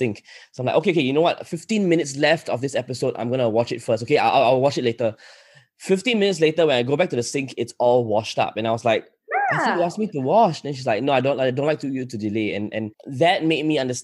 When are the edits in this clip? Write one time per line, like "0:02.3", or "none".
0:13.0